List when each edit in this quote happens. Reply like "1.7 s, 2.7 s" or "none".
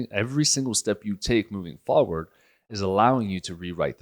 2.7 s